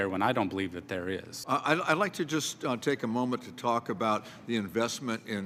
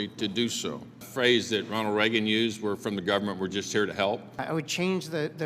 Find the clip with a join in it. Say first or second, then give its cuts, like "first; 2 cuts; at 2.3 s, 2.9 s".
second; 2 cuts; at 1.1 s, 4.3 s